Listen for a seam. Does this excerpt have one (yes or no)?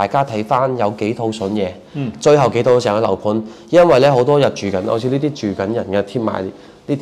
no